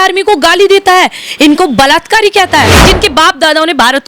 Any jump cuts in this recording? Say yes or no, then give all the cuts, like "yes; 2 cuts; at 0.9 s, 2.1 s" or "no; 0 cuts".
yes; 1 cut; at 2.8 s